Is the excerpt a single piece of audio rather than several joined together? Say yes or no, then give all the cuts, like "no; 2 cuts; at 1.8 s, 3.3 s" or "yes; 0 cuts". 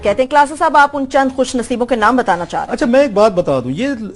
yes; 0 cuts